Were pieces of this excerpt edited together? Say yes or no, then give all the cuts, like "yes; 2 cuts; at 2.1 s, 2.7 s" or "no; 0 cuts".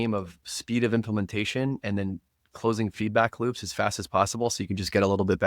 no; 0 cuts